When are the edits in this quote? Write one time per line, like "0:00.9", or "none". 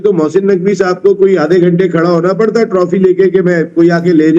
none